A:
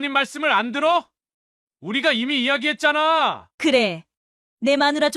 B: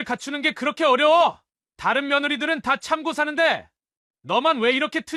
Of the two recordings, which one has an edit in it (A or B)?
A